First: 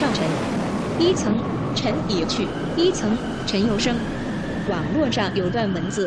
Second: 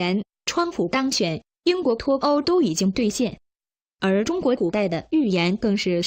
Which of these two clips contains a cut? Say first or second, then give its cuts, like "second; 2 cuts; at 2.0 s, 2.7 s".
second; 1 cut; at 4.3 s